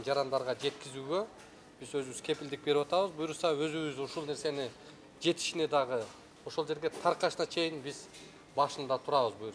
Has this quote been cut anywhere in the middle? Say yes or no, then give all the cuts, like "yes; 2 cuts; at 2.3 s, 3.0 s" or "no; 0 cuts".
no; 0 cuts